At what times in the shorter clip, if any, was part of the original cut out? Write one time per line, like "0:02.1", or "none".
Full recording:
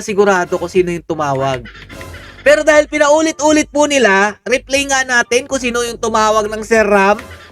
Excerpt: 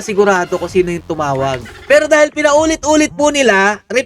0:01.7